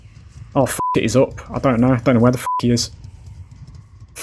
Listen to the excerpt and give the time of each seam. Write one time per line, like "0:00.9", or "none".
none